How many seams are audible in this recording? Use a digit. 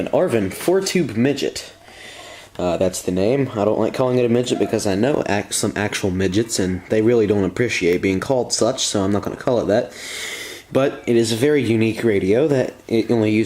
1